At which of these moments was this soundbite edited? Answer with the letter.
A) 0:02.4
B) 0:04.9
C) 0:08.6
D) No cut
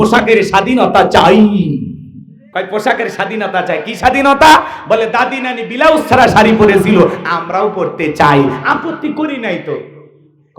A